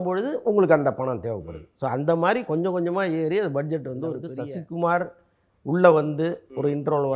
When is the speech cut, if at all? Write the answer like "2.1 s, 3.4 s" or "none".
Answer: 4.3 s

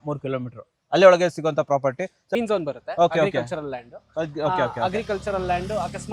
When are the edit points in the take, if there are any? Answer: 2.2 s

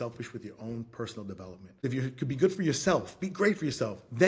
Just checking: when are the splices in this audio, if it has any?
1.8 s

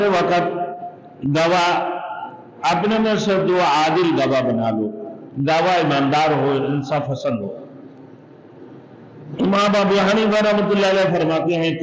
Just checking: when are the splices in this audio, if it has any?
none

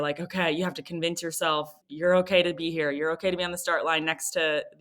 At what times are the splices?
1.8 s

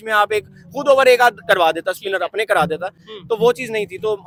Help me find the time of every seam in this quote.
none

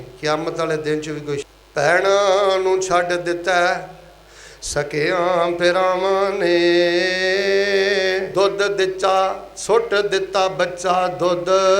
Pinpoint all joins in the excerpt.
1.4 s, 8.3 s

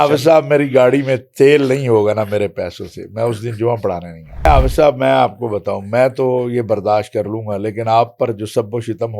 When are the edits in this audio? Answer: 4.5 s

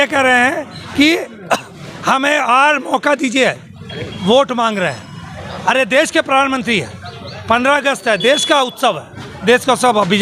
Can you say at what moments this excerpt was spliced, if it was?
none

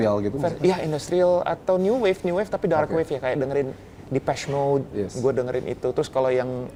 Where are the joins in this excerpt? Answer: none

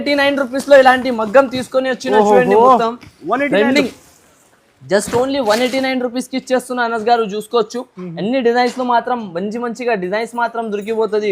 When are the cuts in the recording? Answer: none

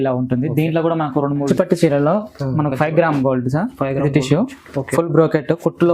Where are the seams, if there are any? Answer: 1.5 s

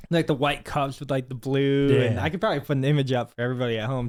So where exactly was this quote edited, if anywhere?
none

